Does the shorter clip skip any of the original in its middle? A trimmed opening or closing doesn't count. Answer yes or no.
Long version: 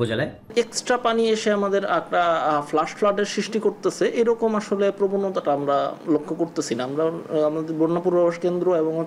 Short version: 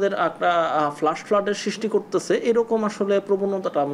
no